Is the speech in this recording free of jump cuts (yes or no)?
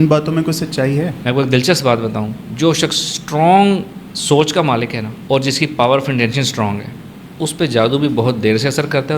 no